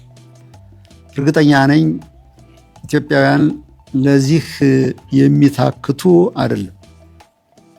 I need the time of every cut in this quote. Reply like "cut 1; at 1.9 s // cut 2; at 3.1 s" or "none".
cut 1; at 1.1 s